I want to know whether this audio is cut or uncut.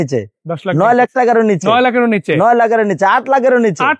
uncut